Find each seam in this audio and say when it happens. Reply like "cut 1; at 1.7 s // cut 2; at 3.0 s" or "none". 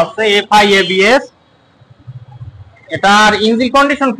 none

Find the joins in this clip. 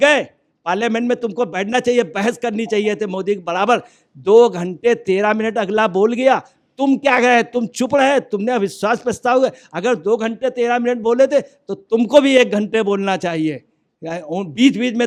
none

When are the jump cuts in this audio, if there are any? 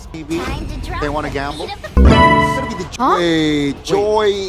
cut 1; at 2.8 s

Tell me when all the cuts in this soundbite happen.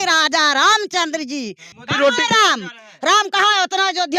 cut 1; at 1.7 s

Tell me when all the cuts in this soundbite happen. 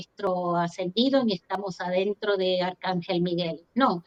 none

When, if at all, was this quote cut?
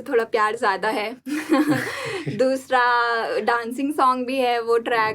none

